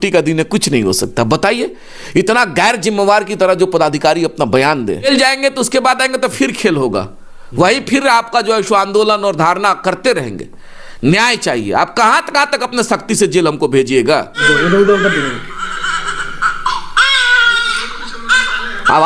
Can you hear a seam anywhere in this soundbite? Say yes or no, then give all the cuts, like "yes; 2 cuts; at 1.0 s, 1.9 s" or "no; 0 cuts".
yes; 2 cuts; at 5.1 s, 14.3 s